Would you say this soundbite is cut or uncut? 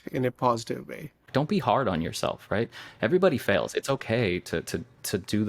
cut